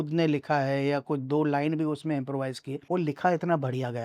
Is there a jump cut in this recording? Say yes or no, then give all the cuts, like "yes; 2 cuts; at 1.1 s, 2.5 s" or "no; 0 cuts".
yes; 1 cut; at 2.7 s